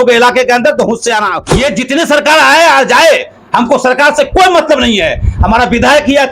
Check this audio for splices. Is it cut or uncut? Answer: cut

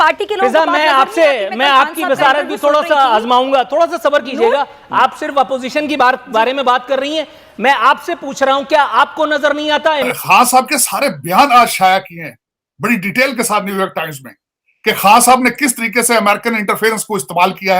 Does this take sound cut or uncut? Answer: cut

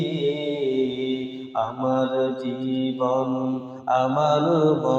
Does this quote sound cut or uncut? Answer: uncut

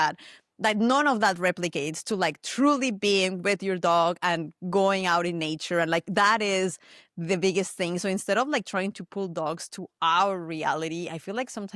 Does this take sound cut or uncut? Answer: uncut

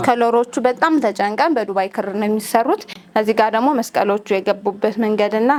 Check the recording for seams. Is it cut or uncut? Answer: uncut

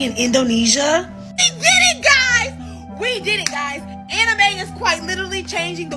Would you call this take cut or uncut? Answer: uncut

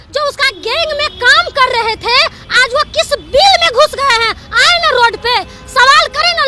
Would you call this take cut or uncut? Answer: uncut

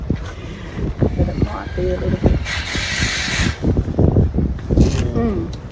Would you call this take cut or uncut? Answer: uncut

